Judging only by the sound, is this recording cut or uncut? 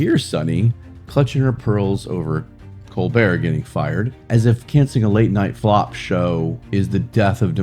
cut